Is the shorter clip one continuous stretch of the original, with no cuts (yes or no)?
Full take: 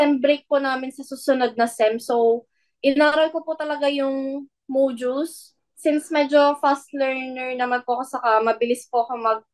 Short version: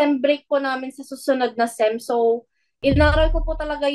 yes